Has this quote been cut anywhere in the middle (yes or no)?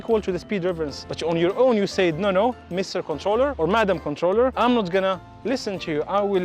yes